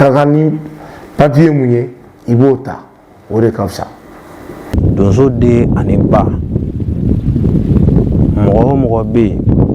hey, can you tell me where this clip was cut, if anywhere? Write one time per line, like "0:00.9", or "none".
0:04.5